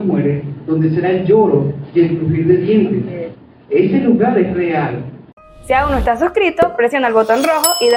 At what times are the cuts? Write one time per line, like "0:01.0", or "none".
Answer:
0:05.4